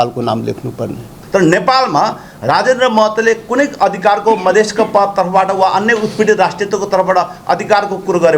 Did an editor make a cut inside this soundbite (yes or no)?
yes